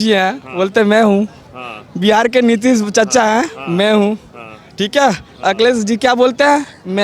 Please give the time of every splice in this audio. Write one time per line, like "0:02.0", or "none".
none